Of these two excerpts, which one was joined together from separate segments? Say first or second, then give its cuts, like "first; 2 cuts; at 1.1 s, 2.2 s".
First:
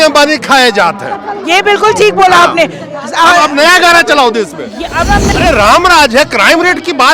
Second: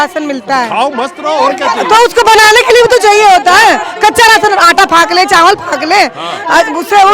first; 1 cut; at 5.3 s